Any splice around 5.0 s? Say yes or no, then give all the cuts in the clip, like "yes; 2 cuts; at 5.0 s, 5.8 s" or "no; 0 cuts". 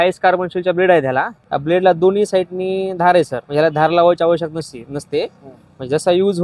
no; 2 cuts; at 1.4 s, 3.4 s